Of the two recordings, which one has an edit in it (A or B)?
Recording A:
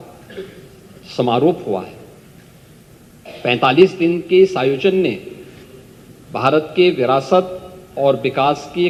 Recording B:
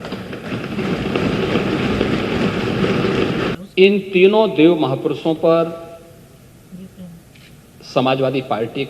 B